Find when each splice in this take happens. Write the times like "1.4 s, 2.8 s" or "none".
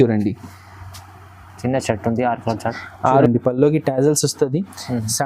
3.3 s